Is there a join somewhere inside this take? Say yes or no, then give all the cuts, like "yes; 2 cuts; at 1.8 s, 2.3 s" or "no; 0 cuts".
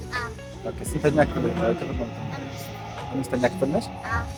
no; 0 cuts